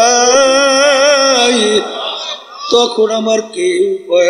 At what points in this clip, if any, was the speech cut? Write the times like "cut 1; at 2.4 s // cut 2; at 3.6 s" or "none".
none

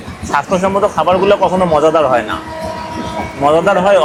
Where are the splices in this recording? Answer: none

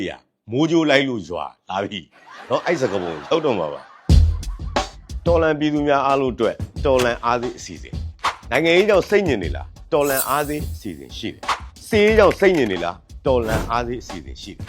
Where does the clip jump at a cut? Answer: cut 1; at 3.9 s

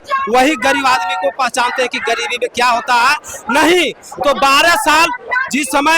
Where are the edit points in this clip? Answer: none

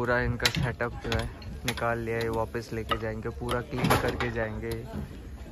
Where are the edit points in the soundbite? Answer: none

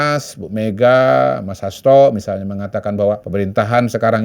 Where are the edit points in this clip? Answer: cut 1; at 3.2 s

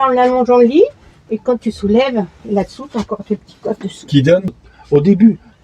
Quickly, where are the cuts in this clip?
cut 1; at 4.7 s

